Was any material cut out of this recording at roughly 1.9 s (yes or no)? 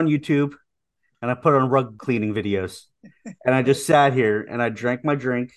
yes